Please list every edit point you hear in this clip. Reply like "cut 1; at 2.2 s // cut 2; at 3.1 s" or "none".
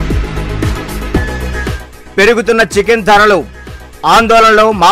cut 1; at 1.1 s